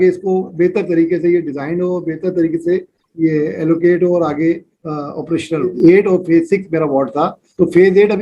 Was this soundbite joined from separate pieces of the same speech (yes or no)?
yes